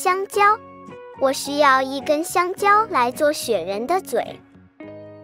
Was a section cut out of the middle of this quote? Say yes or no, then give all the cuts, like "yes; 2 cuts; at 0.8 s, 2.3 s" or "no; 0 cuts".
yes; 1 cut; at 4.3 s